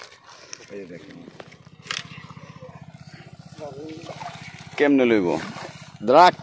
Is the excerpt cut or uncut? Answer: cut